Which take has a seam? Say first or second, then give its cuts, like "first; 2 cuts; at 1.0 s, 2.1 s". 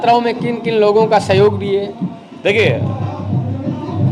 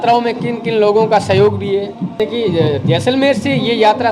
second; 1 cut; at 2.1 s